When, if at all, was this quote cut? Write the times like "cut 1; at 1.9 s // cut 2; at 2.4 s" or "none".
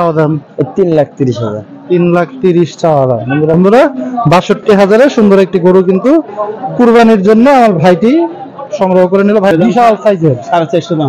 cut 1; at 3.5 s // cut 2; at 9.5 s